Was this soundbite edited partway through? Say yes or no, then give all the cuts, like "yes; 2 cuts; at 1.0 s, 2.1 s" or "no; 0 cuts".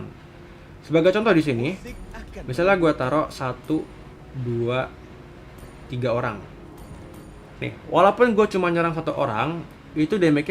no; 0 cuts